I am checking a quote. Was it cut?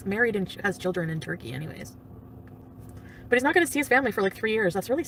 no; 0 cuts

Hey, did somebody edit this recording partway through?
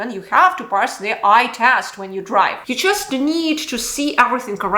yes; 1 cut; at 2.6 s

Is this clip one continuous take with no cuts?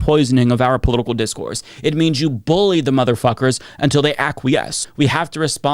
no; 1 cut; at 4.8 s

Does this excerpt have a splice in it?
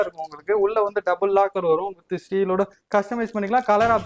no; 0 cuts

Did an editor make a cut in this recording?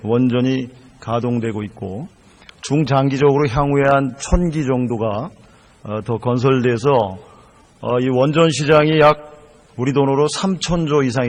yes; 1 cut; at 3.0 s

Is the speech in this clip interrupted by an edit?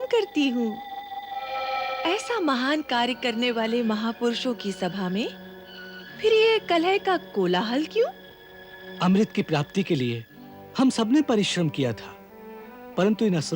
no; 0 cuts

